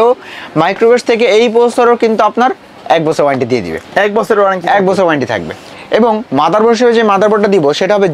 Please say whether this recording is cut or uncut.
uncut